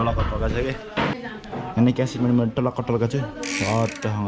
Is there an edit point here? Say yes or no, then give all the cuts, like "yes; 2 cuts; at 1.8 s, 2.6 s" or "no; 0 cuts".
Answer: yes; 1 cut; at 1.1 s